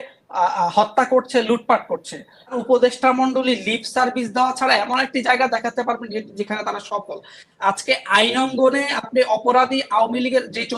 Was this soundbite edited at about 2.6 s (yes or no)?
yes